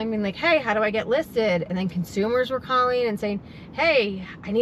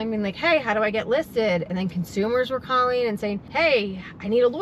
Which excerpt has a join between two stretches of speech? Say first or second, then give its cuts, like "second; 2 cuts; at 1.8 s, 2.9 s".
second; 1 cut; at 3.4 s